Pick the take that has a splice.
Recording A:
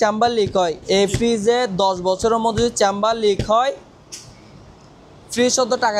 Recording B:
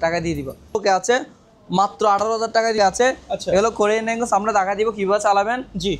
B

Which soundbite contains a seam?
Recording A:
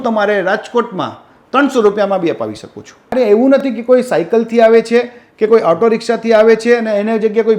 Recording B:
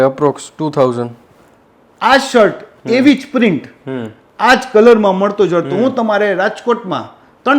A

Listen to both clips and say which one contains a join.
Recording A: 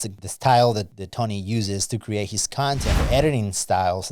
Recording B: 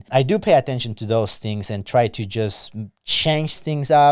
A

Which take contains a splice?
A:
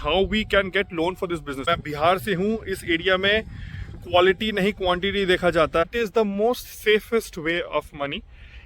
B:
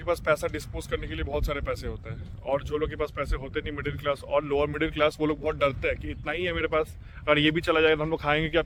A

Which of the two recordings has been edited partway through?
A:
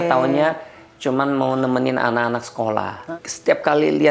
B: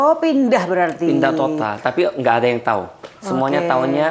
A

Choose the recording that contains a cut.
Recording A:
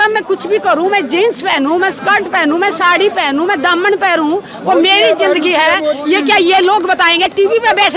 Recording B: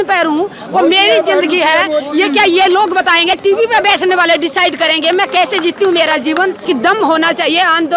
B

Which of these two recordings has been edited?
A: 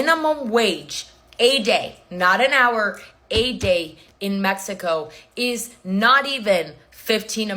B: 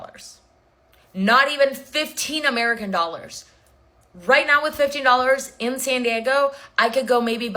A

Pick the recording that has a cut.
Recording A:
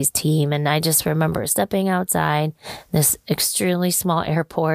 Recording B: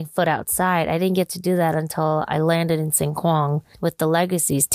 B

